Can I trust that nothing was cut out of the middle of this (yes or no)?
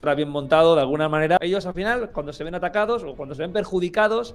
no